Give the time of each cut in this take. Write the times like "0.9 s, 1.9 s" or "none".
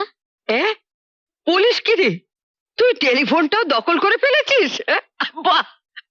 none